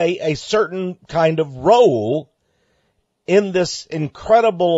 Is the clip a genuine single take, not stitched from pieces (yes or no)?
no